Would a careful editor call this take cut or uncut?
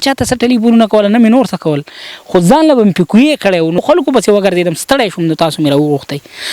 cut